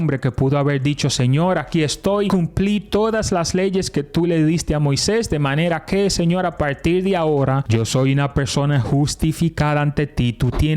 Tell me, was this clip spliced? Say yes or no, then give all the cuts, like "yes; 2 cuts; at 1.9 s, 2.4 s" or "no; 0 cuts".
yes; 2 cuts; at 2.3 s, 7.6 s